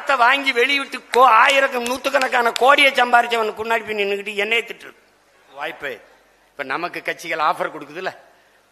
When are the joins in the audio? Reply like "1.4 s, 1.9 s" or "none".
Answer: 5.6 s